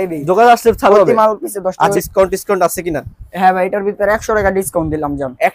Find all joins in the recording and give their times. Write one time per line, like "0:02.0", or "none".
0:01.9